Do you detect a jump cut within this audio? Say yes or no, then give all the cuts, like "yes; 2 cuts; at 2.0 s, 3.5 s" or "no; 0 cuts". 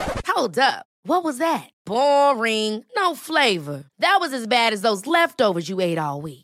no; 0 cuts